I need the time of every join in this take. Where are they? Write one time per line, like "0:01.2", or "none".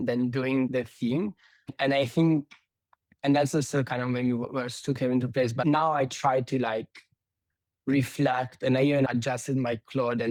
none